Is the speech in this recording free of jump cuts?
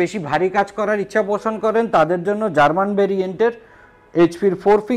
yes; 0 cuts

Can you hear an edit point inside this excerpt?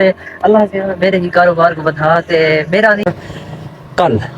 yes; 1 cut; at 3.1 s

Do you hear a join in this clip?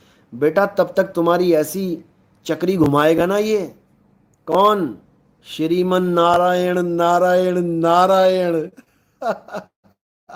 no; 0 cuts

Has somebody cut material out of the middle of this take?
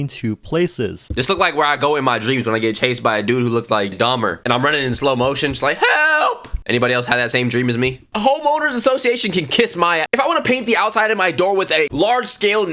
yes; 3 cuts; at 8.1 s, 10.1 s, 11.9 s

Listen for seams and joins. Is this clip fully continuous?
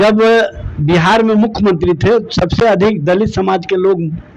yes; 0 cuts

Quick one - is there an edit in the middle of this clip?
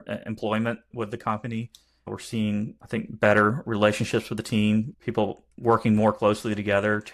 yes; 4 cuts; at 0.9 s, 2.0 s, 2.8 s, 4.9 s

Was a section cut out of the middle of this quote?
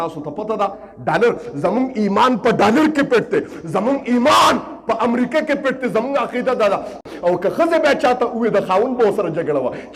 yes; 1 cut; at 6.9 s

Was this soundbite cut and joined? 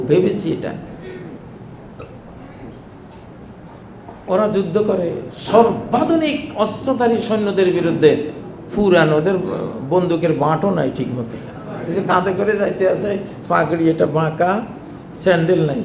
no; 0 cuts

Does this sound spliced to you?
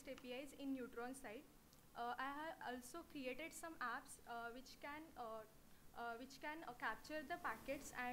yes; 1 cut; at 2.5 s

